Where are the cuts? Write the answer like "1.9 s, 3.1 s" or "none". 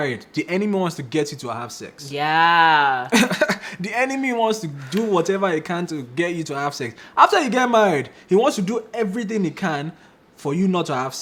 none